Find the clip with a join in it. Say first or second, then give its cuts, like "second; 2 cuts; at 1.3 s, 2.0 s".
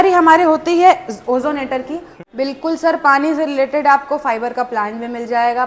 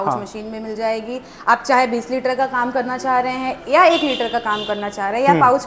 first; 1 cut; at 2.2 s